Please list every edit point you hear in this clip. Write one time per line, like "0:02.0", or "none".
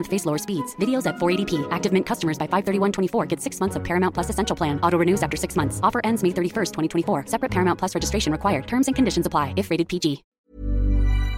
0:10.3